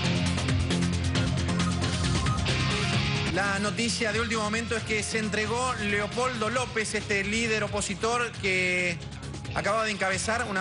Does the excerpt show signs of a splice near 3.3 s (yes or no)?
yes